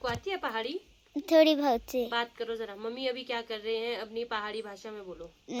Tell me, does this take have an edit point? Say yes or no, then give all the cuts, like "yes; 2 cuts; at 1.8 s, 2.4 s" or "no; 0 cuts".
no; 0 cuts